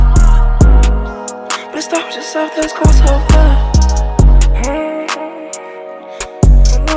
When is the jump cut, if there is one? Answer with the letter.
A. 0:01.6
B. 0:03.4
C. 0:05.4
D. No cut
D